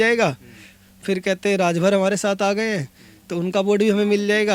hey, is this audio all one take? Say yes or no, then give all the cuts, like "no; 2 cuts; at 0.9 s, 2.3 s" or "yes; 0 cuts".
yes; 0 cuts